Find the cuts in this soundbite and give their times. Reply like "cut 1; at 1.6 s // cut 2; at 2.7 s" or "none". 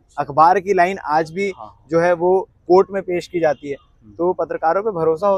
none